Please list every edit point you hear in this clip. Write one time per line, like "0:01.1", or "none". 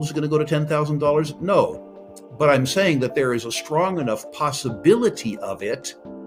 none